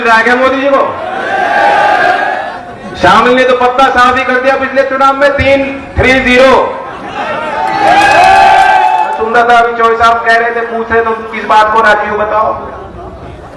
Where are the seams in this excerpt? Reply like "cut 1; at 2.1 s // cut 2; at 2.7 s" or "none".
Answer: cut 1; at 2.4 s // cut 2; at 9.1 s